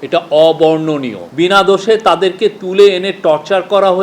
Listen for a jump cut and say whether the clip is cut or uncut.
cut